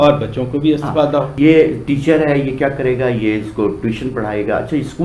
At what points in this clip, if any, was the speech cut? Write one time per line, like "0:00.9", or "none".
0:01.3

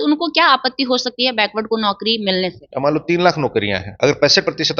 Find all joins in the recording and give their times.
0:02.6
0:03.9

